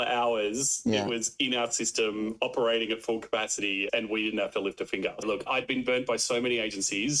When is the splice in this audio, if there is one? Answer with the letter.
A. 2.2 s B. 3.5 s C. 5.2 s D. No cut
C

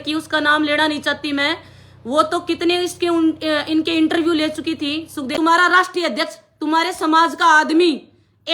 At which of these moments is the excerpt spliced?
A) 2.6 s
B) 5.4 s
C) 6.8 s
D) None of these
B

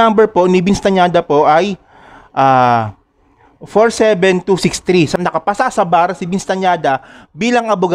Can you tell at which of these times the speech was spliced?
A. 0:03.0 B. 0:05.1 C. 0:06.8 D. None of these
B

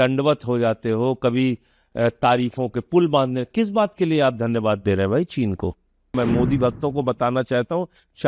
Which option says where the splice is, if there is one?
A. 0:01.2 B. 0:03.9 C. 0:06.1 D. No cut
C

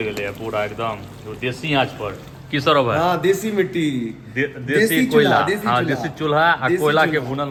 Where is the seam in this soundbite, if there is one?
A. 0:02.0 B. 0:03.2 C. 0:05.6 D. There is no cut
D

